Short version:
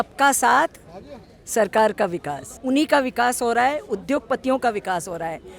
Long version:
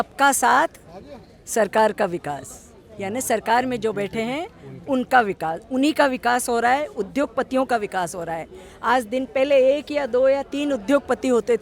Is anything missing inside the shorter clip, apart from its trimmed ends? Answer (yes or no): yes